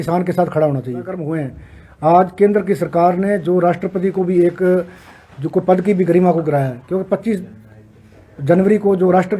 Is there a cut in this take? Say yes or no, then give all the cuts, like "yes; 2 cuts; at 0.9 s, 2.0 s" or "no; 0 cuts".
yes; 1 cut; at 1.3 s